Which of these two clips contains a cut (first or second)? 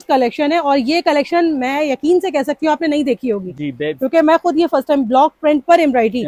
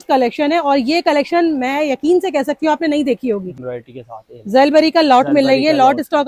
second